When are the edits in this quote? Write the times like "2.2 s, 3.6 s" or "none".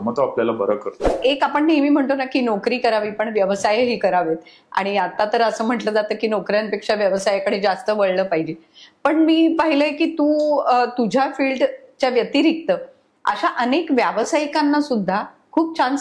1.1 s

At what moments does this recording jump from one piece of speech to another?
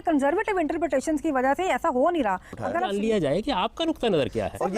2.7 s

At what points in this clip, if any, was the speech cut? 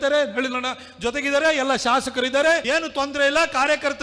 2.6 s

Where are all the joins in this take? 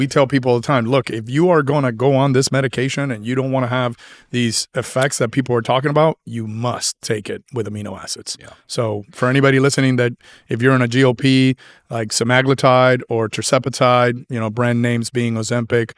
none

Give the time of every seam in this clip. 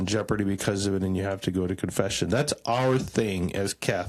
none

